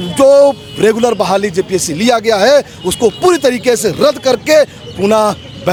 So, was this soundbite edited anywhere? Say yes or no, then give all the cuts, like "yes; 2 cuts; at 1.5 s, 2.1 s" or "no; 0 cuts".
no; 0 cuts